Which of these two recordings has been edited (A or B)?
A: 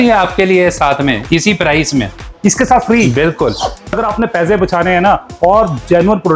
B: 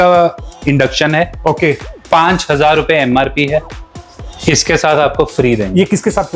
A